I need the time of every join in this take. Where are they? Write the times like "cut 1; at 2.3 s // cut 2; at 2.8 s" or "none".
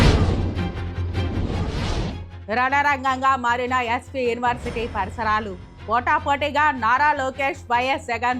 cut 1; at 2.3 s